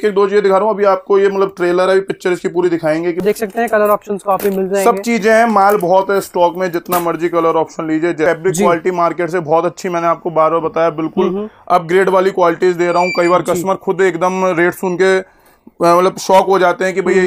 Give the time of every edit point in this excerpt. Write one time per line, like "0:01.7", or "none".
0:03.2
0:08.3

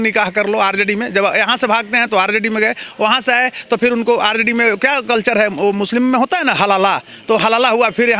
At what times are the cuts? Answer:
none

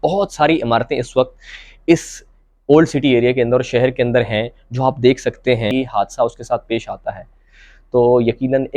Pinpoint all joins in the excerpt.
0:05.7

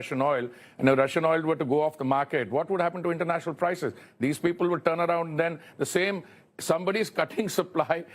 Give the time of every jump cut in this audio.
none

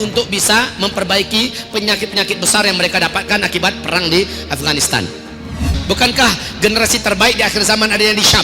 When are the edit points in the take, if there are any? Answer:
0:05.7

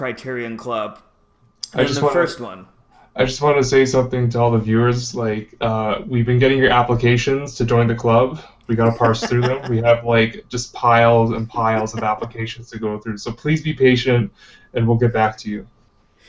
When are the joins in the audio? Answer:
none

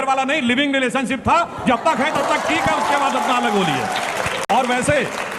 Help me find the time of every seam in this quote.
none

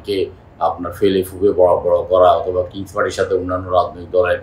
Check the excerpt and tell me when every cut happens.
none

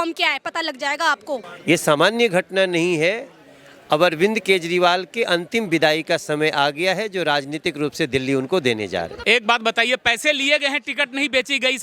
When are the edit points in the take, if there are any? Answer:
0:01.5
0:09.1

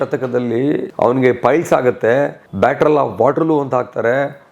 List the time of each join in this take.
0:00.9
0:02.4

